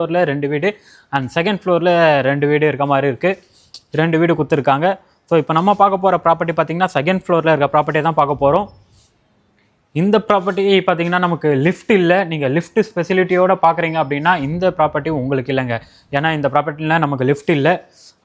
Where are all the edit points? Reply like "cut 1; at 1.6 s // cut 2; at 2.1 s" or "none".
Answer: none